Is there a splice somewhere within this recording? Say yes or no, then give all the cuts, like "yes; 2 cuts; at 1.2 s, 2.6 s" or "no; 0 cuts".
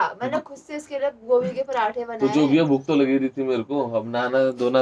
no; 0 cuts